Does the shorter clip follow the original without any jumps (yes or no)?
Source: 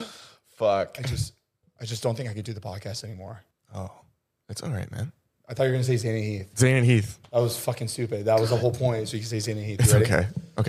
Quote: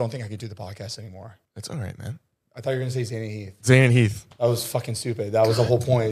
no